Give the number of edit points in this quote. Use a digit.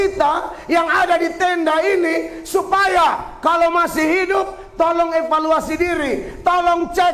0